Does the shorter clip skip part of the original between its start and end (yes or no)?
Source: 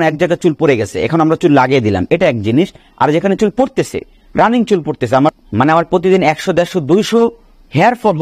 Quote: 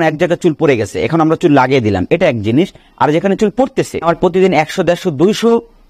yes